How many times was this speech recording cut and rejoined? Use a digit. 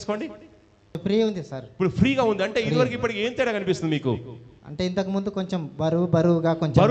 1